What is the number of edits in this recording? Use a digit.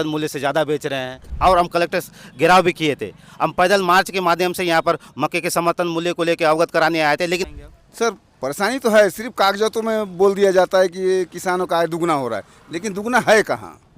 2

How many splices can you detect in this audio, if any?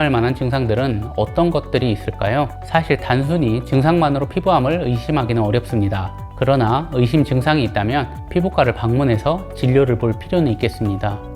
0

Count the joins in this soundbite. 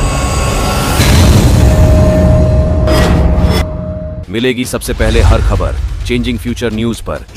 0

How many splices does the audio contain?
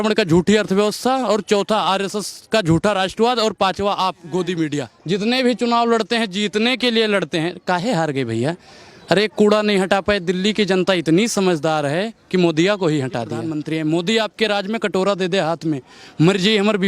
2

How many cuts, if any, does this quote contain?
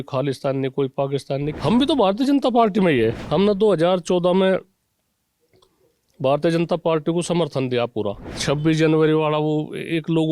3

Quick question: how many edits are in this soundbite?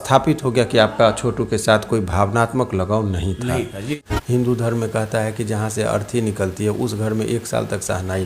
1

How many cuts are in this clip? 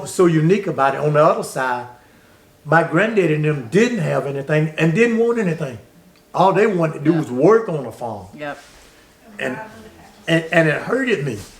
0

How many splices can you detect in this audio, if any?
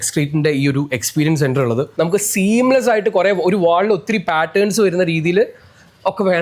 1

